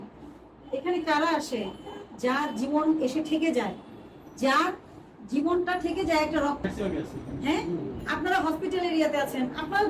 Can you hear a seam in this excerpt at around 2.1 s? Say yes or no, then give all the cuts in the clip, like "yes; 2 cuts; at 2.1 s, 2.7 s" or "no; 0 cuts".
no; 0 cuts